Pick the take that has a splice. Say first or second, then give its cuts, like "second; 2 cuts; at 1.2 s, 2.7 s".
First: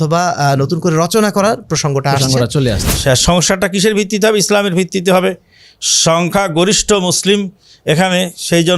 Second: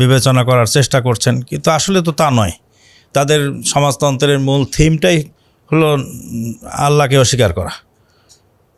first; 1 cut; at 2.8 s